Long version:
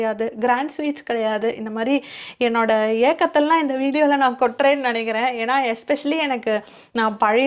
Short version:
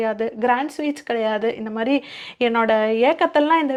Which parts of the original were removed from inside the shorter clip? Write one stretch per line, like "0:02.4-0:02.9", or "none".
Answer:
none